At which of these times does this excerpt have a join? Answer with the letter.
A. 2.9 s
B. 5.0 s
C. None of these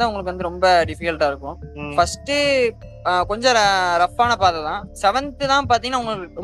B